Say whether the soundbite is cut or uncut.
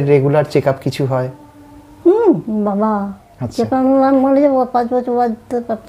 uncut